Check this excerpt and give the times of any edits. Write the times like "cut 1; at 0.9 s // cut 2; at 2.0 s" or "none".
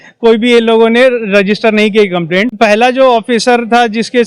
cut 1; at 2.5 s